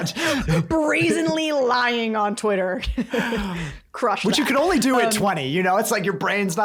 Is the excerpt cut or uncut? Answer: uncut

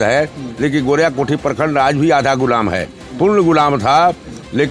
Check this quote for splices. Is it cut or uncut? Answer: uncut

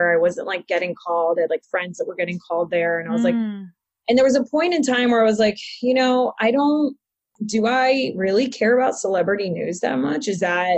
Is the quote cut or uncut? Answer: cut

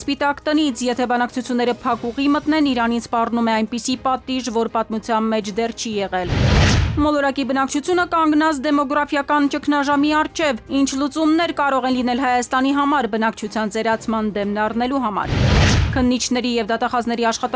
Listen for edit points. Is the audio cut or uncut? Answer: uncut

